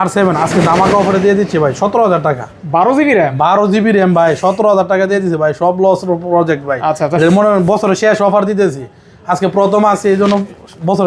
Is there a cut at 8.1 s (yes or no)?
no